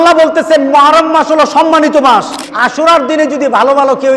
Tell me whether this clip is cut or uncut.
cut